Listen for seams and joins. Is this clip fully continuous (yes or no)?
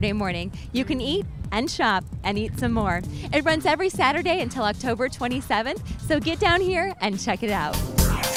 yes